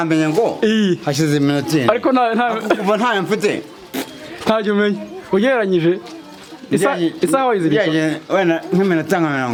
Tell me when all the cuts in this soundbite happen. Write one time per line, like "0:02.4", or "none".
none